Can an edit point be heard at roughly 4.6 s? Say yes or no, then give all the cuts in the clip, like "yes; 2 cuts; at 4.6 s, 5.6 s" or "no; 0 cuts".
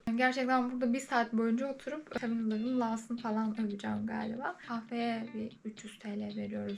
yes; 1 cut; at 4.6 s